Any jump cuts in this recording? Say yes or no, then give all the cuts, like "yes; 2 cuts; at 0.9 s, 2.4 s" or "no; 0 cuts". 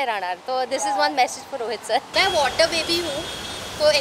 yes; 1 cut; at 2.1 s